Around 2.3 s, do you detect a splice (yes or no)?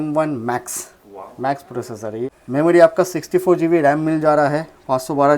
yes